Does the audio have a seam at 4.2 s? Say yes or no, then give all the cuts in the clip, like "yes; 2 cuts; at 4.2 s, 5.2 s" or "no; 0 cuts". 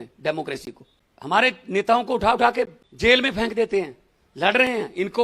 no; 1 cut; at 2.8 s